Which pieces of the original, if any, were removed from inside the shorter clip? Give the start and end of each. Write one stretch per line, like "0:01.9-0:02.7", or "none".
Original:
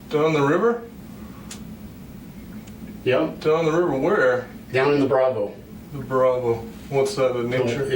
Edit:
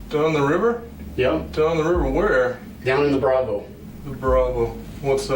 0:01.0-0:02.8

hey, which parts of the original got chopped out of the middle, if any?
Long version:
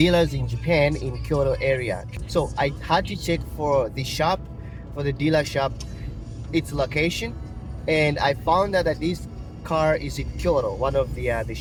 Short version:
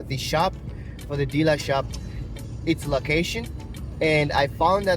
none

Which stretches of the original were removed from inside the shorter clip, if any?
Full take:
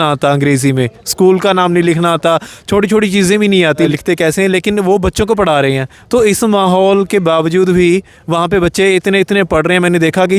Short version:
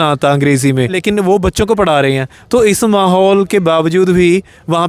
0:01.0-0:04.6

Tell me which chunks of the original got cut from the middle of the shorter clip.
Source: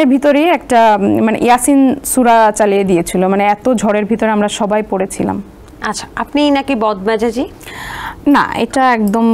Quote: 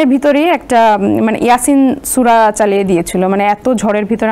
none

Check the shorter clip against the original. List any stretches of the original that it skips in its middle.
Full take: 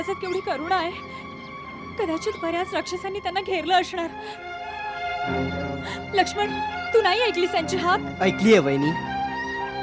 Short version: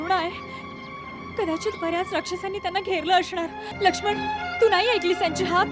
0:04.3-0:06.0

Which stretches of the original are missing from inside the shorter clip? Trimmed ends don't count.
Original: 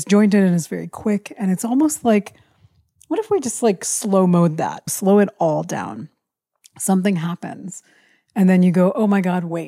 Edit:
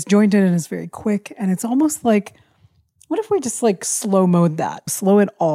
none

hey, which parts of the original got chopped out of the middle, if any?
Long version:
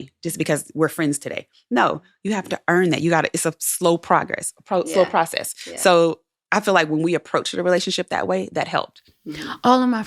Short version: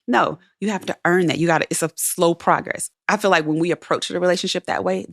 0:04.5-0:06.3

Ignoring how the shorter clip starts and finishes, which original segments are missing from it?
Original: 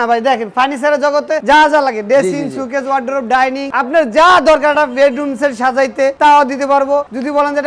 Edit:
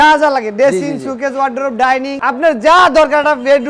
none

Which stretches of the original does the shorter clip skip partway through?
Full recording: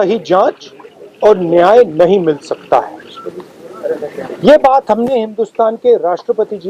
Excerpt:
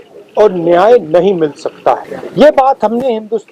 0:03.0-0:04.2

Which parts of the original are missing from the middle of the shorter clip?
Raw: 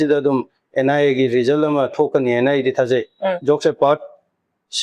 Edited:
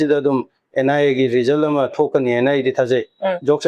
none

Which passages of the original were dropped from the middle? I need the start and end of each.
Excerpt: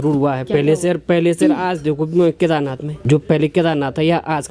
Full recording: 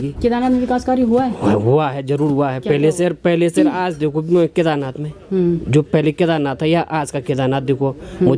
0:05.2-0:05.6

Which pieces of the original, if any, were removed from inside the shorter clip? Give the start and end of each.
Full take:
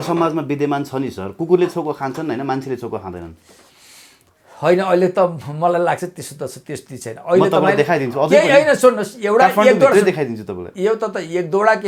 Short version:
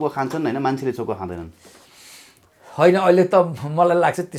none

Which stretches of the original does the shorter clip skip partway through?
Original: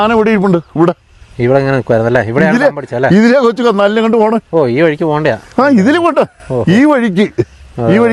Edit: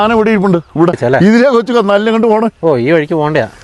0:01.0-0:02.9

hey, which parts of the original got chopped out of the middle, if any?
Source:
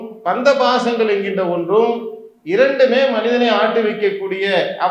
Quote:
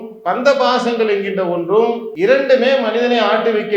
0:02.1-0:02.4

